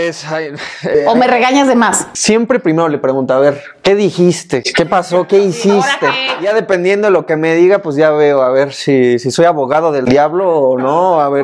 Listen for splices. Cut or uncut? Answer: cut